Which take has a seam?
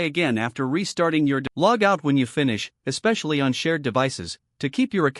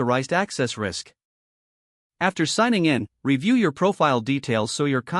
first; 1 cut; at 1.5 s

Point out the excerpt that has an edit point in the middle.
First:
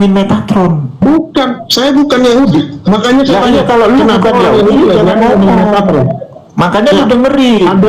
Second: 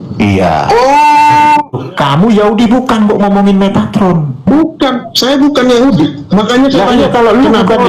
second; 1 cut; at 1.8 s

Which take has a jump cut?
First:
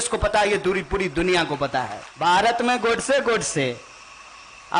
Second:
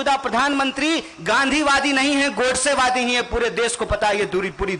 first; 1 cut; at 2.0 s

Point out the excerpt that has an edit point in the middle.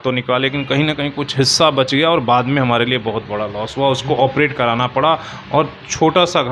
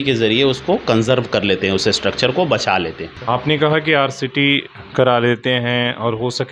second; 1 cut; at 3.1 s

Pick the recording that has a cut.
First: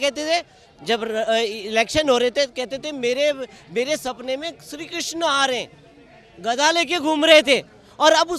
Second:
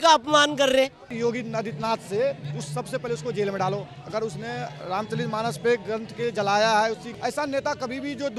second; 2 cuts; at 1.1 s, 7.1 s

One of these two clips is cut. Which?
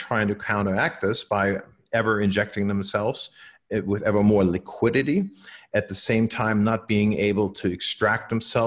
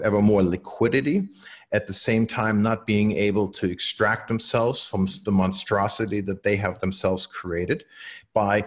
first; 1 cut; at 1.7 s

